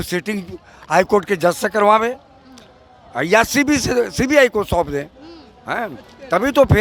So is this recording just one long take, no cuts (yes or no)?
yes